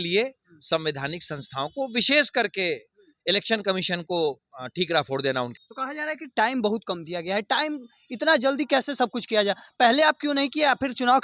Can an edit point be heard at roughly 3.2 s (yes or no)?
no